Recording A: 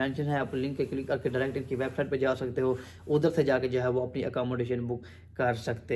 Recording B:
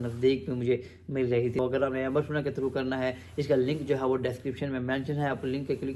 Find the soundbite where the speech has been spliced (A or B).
B